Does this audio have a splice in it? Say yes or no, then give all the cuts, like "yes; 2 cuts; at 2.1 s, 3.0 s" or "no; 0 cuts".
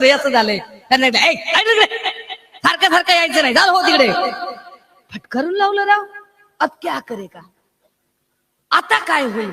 no; 0 cuts